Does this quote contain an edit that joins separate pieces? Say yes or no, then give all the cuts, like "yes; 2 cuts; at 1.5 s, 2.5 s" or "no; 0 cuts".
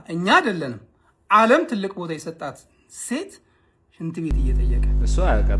no; 0 cuts